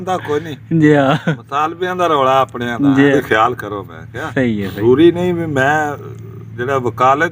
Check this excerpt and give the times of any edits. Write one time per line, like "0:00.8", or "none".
0:03.1
0:04.8